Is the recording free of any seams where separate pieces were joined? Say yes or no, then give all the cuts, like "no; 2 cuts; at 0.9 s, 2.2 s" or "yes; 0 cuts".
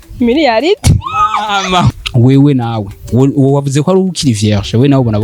no; 1 cut; at 1.9 s